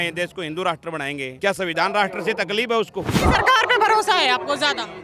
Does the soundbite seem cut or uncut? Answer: cut